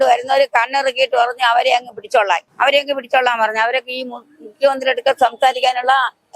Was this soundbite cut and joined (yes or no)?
yes